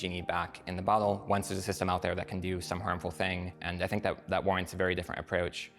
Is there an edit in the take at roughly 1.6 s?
no; 1 cut; at 3.6 s

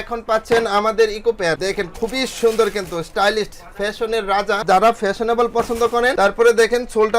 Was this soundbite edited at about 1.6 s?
yes; 3 cuts; at 1.6 s, 4.6 s, 6.1 s

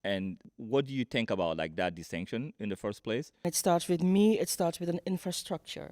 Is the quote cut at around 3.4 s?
yes; 1 cut; at 3.4 s

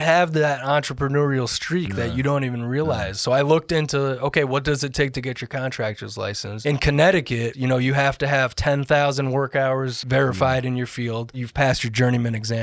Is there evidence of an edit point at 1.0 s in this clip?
no; 5 cuts; at 3.2 s, 6.5 s, 7.5 s, 10.0 s, 11.4 s

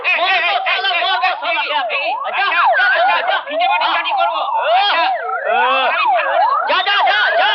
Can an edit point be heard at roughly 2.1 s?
no; 0 cuts

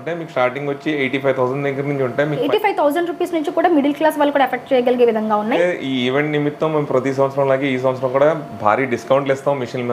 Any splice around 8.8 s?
no; 2 cuts; at 2.5 s, 5.6 s

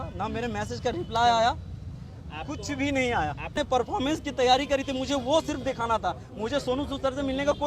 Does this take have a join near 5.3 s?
no; 1 cut; at 3.6 s

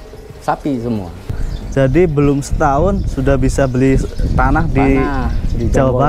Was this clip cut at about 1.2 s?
yes; 1 cut; at 1.2 s

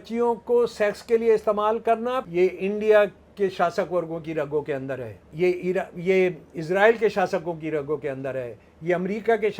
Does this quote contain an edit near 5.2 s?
yes; 2 cuts; at 2.2 s, 5.2 s

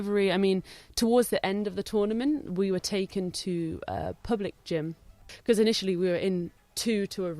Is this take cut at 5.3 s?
yes; 1 cut; at 5.3 s

